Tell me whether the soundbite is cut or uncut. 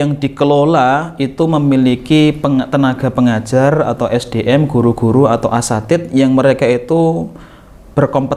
uncut